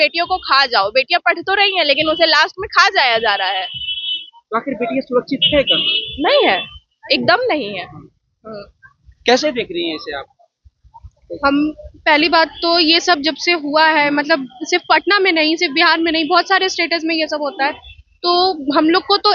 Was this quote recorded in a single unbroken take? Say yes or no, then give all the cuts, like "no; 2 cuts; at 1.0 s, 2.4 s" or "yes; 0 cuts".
yes; 0 cuts